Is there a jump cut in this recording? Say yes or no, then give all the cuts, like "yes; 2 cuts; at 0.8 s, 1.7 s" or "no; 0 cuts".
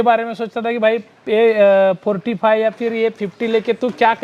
no; 0 cuts